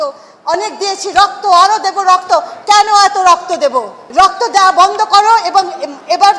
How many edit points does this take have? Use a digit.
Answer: 1